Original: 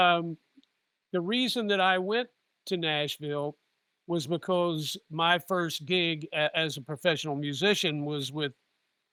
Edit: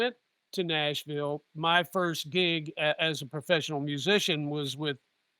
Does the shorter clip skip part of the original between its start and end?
yes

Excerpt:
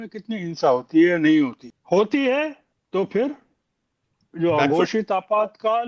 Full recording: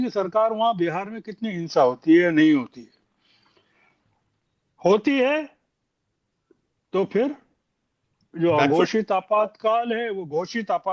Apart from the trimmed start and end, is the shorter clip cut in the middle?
yes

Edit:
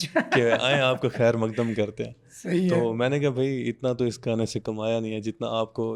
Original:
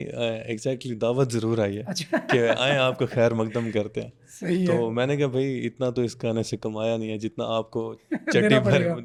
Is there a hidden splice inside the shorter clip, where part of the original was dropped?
no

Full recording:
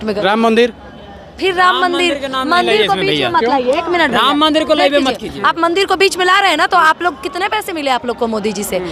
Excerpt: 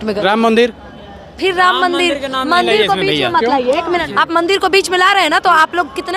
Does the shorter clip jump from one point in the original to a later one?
yes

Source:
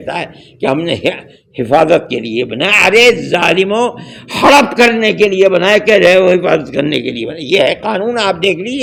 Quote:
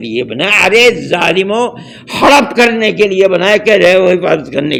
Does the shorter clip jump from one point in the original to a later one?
no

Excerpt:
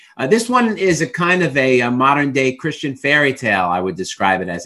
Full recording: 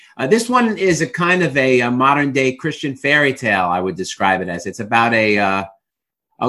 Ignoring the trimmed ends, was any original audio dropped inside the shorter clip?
no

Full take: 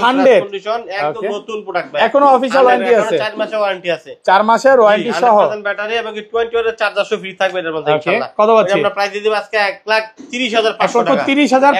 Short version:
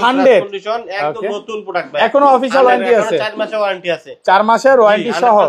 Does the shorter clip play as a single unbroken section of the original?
yes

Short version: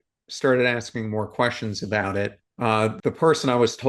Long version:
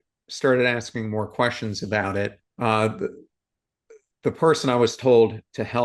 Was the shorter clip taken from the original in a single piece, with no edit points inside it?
no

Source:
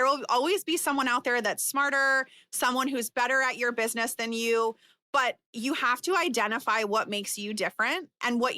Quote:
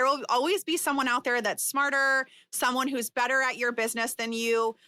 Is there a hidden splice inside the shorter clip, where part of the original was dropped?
no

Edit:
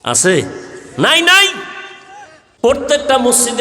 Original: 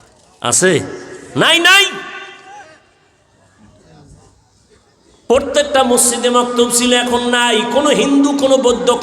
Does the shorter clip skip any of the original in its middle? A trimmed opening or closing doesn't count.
yes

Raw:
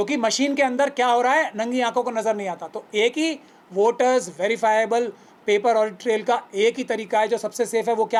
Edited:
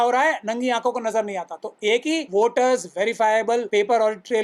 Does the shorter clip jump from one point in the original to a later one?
yes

